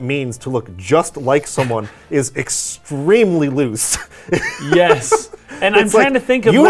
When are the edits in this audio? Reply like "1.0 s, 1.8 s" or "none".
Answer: none